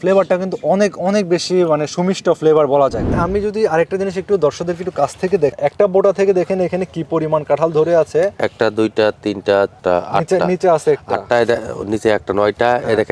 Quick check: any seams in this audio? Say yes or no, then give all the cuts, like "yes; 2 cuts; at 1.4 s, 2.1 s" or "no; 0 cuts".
yes; 3 cuts; at 3.1 s, 5.5 s, 9.8 s